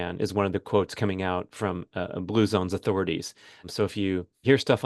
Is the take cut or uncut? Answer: cut